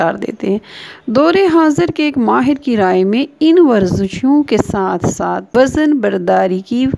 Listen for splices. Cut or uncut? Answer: cut